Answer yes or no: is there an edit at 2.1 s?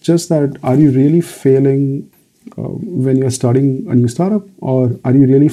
yes